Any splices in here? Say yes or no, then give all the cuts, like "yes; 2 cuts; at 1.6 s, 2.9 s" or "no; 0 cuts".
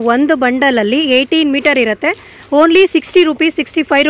no; 0 cuts